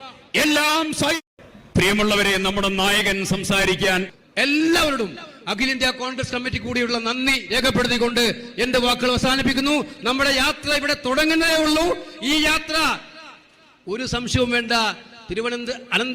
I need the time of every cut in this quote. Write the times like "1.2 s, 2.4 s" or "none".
1.2 s, 4.1 s